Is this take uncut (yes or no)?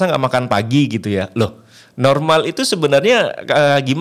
yes